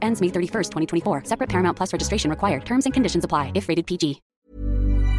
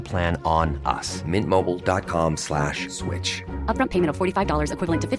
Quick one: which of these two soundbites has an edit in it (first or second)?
first